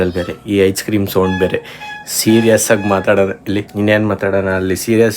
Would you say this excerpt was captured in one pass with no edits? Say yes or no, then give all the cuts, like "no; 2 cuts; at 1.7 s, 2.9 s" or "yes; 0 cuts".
no; 1 cut; at 3.7 s